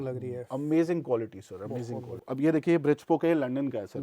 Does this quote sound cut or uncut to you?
cut